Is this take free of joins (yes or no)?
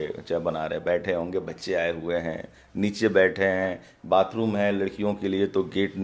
yes